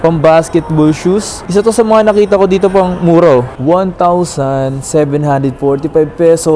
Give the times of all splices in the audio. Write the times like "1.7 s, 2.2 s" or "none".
3.5 s

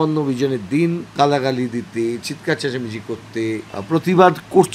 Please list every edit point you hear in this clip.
1.1 s, 3.7 s

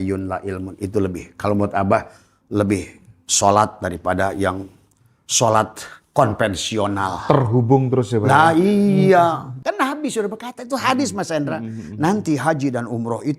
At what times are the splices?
9.6 s

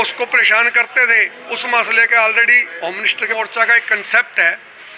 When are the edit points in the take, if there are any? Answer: 3.3 s

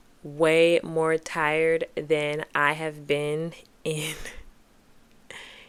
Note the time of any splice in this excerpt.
none

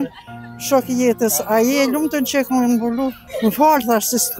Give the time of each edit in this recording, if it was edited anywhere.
3.2 s

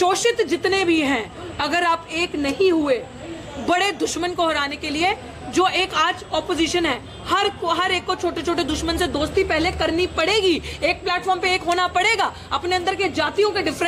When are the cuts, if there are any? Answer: none

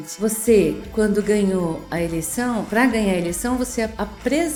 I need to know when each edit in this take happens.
none

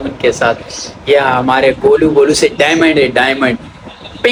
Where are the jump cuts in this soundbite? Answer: none

